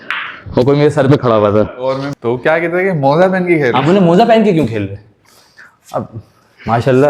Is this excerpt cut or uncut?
cut